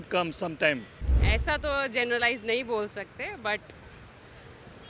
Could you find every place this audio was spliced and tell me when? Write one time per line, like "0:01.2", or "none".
0:00.9